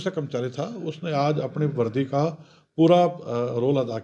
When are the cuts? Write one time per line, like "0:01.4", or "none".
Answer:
none